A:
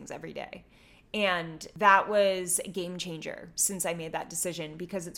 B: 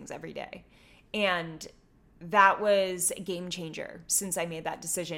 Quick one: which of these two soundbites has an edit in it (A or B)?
A